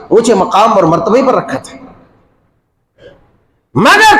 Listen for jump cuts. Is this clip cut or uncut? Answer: uncut